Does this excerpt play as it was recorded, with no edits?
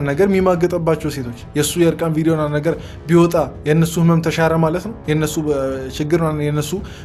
yes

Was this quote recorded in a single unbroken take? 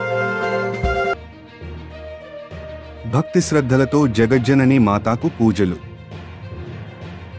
no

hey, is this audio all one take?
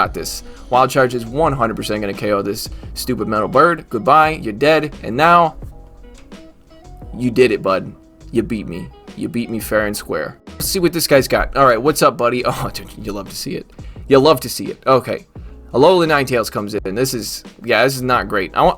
no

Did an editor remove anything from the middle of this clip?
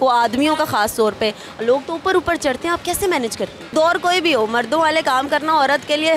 yes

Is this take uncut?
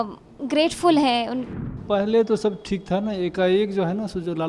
no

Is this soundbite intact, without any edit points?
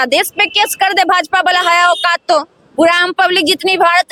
yes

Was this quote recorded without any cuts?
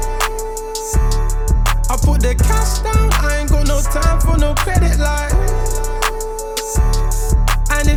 yes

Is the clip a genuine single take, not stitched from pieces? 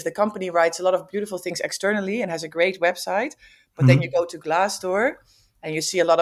yes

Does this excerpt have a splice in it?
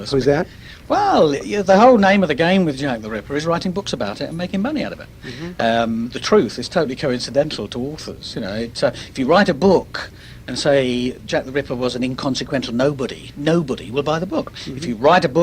yes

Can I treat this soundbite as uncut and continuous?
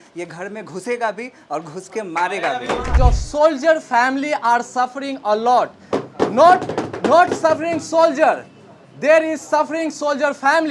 no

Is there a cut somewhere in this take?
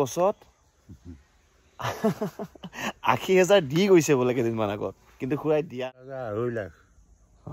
yes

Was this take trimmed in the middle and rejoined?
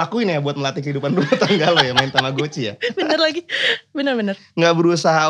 no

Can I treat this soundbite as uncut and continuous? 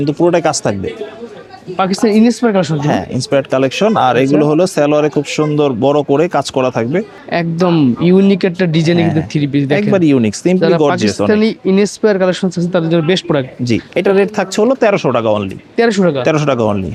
yes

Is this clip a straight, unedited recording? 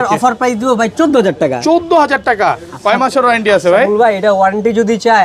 yes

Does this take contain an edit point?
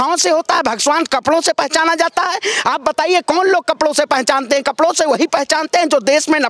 no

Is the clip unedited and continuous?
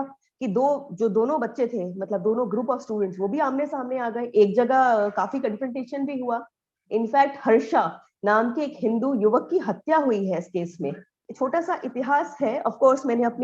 no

